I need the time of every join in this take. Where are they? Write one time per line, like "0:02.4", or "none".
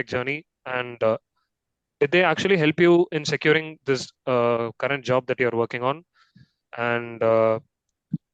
none